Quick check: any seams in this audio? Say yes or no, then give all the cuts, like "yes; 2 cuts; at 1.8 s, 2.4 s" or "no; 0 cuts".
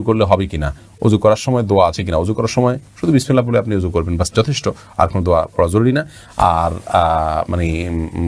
no; 0 cuts